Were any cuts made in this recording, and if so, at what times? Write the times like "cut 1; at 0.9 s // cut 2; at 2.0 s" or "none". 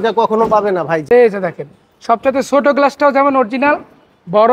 cut 1; at 1.0 s